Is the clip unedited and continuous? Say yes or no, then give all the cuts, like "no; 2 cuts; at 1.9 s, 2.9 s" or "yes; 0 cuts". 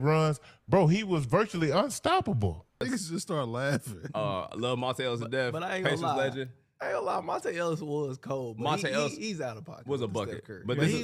no; 1 cut; at 2.8 s